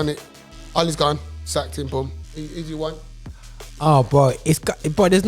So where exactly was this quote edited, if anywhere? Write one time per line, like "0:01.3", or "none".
none

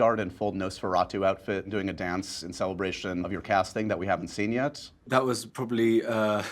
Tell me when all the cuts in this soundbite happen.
0:01.7
0:03.3
0:05.0

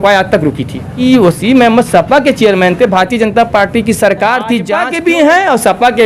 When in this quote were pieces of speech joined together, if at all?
0:00.9
0:04.8

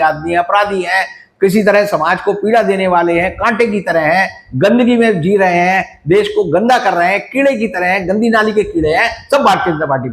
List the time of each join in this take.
none

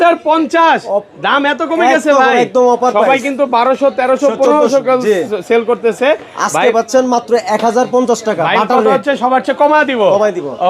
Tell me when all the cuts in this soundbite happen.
none

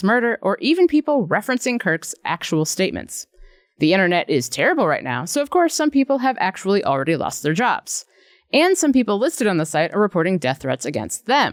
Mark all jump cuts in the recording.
none

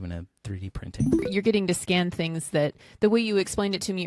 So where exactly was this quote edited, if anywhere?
0:01.3
0:02.8

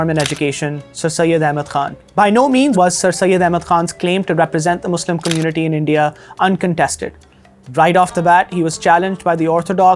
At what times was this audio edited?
0:02.7

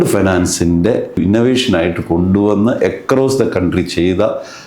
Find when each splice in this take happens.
0:01.2

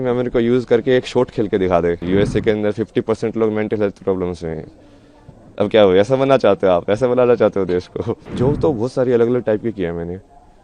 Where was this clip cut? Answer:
0:02.0
0:08.2

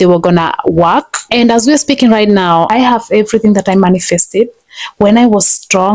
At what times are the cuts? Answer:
0:01.2
0:02.7

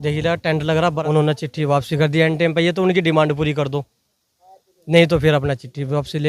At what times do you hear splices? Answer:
0:01.0

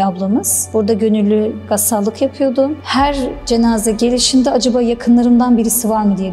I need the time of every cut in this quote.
none

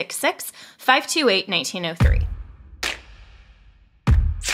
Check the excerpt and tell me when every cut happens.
0:02.0

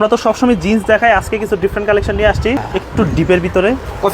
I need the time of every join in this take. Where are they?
0:02.6

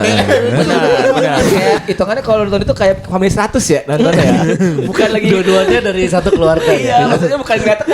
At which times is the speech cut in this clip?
0:01.4

